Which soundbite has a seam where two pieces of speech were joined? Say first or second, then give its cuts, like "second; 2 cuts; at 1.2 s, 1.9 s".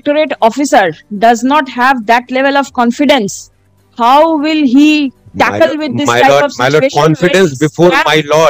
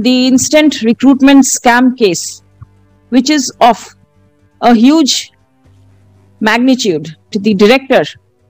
second; 1 cut; at 7.4 s